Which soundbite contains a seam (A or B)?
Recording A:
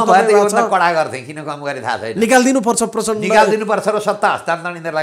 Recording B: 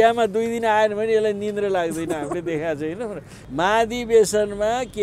B